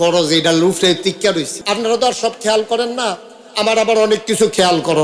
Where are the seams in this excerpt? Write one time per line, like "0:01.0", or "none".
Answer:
0:01.5